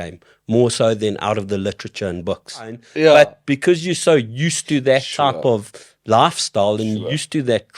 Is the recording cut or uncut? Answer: cut